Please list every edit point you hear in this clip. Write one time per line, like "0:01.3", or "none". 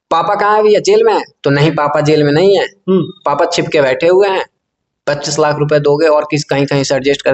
none